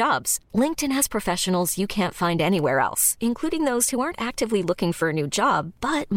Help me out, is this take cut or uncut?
uncut